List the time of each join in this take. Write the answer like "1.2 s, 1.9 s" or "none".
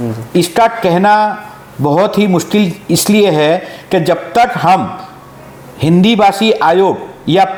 none